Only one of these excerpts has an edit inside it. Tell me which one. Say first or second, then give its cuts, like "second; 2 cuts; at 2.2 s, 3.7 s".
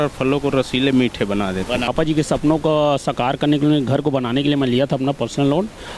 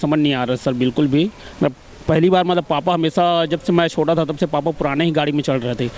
first; 1 cut; at 1.9 s